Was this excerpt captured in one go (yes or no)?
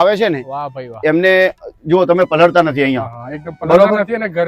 yes